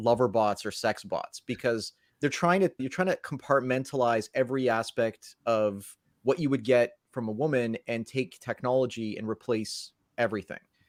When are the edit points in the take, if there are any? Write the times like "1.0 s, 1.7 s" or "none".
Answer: none